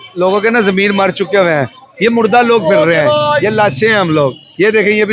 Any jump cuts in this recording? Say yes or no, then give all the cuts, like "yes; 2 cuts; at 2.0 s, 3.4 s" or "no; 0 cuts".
no; 0 cuts